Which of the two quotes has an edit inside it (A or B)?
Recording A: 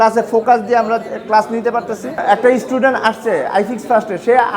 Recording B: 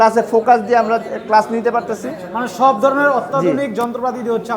A